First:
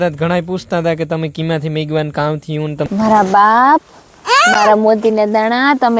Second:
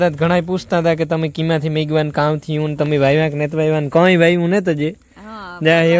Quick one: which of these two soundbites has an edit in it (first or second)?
first